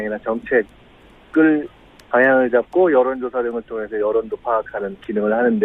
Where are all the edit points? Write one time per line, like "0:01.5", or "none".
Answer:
0:02.9